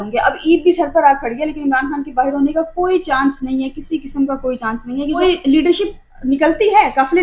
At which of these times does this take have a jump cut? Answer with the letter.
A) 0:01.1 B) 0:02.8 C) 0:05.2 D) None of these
C